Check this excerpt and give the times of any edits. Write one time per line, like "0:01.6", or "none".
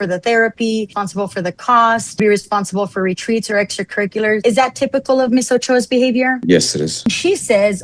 0:01.0
0:02.2
0:04.4
0:07.1